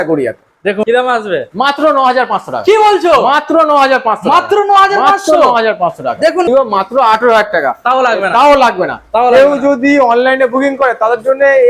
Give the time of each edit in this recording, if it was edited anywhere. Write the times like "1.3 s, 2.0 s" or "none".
0.8 s, 6.5 s